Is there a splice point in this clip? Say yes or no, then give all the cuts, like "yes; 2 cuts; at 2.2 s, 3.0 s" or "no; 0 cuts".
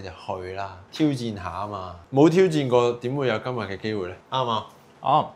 no; 0 cuts